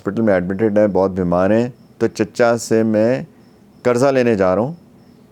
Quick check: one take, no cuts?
yes; 0 cuts

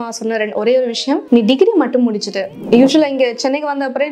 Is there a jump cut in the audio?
yes; 2 cuts; at 1.2 s, 2.5 s

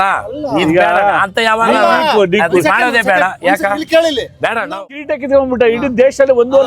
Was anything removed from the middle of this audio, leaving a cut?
yes; 1 cut; at 4.8 s

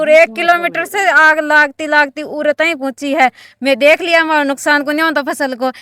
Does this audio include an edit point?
no; 0 cuts

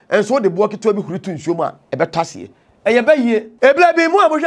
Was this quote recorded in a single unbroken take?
no; 1 cut; at 3.5 s

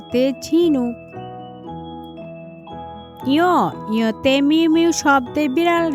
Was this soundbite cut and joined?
no; 0 cuts

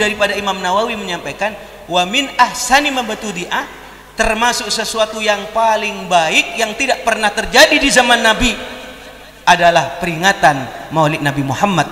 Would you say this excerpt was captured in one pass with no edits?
yes; 0 cuts

